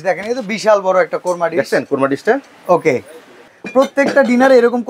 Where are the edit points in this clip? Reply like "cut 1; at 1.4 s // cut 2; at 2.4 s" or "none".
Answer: cut 1; at 3.5 s